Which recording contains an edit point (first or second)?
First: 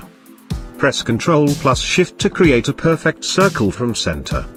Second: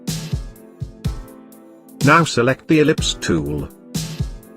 second